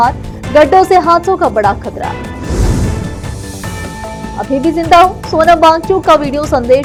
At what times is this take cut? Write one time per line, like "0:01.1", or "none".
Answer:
none